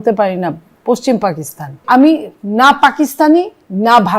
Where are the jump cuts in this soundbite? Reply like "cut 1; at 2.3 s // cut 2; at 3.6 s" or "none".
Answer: cut 1; at 1.8 s